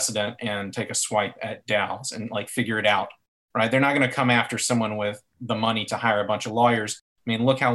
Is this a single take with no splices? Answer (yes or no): yes